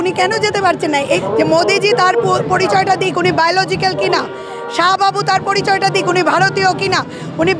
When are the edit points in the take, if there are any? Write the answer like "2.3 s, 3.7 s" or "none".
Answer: 1.2 s